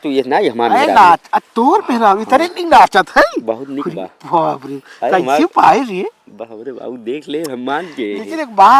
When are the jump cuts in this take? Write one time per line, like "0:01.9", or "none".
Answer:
none